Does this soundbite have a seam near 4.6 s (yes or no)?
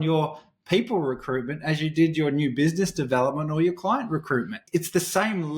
yes